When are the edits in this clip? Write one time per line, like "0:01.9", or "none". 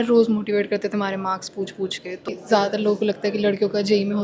0:02.3